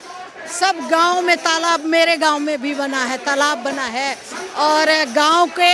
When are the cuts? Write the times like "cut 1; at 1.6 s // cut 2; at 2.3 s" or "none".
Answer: none